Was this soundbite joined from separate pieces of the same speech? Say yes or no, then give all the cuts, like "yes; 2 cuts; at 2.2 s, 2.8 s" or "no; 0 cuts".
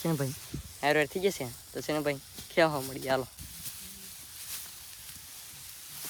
no; 0 cuts